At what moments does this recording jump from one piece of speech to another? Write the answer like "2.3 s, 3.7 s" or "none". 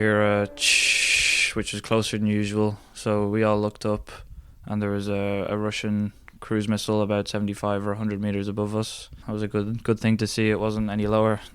9.2 s